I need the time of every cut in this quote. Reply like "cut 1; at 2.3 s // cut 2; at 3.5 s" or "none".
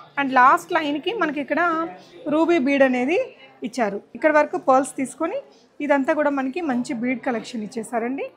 cut 1; at 4.0 s